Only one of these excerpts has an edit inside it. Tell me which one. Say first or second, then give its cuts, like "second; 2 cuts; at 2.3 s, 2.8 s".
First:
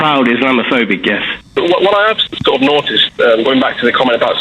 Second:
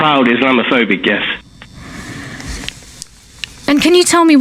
first; 1 cut; at 1.6 s